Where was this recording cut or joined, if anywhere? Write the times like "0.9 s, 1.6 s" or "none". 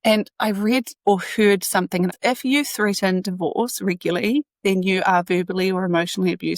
2.2 s